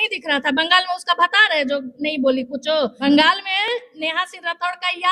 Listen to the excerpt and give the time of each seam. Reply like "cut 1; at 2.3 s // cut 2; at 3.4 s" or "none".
cut 1; at 3.0 s